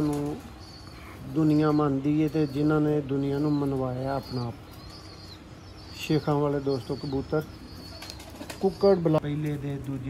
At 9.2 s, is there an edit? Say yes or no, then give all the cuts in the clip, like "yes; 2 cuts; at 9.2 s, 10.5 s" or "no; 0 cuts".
yes; 1 cut; at 9.2 s